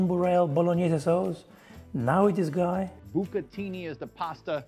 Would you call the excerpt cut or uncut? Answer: cut